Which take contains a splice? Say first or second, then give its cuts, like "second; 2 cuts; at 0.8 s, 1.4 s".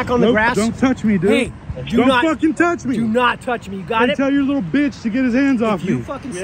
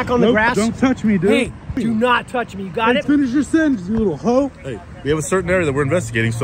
second; 2 cuts; at 1.7 s, 3.0 s